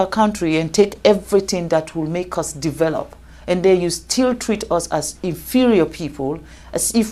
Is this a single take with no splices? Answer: yes; 0 cuts

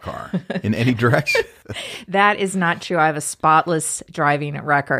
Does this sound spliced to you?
yes; 1 cut; at 1.6 s

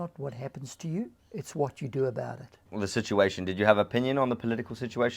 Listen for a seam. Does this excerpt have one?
yes; 2 cuts; at 1.2 s, 2.6 s

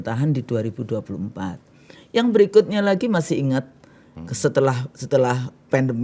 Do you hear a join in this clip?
no; 0 cuts

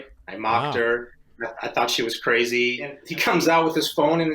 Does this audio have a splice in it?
yes; 1 cut; at 3.0 s

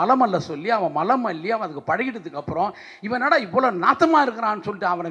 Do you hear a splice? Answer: no; 0 cuts

